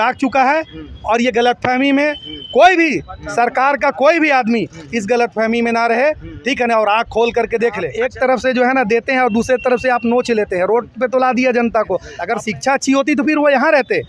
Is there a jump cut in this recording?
yes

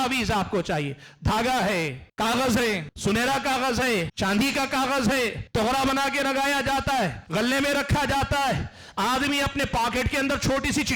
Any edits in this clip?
yes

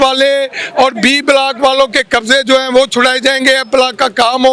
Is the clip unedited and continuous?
yes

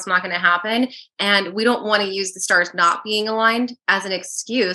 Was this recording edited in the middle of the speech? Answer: no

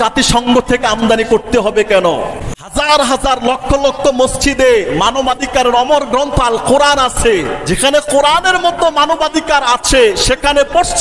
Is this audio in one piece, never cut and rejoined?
no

